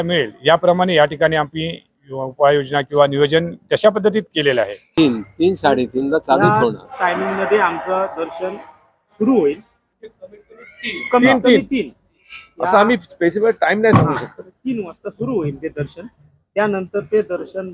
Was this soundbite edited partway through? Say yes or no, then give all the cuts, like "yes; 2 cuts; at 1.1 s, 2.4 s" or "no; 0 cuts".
yes; 1 cut; at 4.8 s